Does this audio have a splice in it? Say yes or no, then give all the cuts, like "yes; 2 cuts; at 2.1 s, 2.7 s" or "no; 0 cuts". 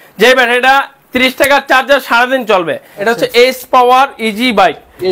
yes; 1 cut; at 2.9 s